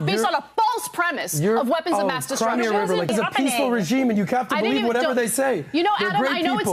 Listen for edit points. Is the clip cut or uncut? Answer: cut